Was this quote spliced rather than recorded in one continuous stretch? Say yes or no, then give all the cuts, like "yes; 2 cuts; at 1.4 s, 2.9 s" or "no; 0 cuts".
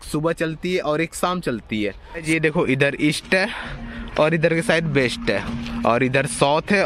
yes; 1 cut; at 2.2 s